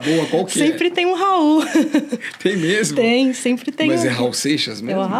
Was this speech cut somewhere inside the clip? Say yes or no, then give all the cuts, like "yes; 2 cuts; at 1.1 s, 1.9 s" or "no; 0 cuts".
no; 0 cuts